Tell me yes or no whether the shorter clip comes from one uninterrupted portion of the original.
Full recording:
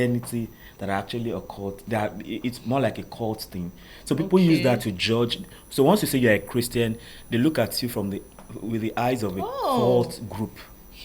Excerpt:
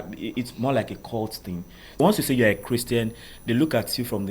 no